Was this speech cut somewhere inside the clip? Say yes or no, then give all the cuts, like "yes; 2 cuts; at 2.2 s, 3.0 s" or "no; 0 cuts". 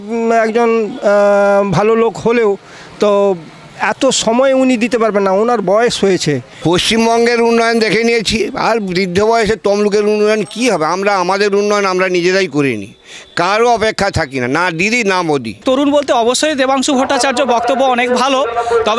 yes; 2 cuts; at 6.5 s, 15.6 s